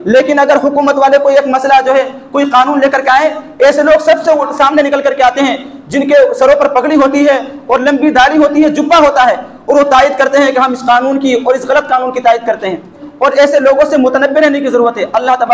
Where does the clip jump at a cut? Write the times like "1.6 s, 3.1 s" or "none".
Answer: 13.0 s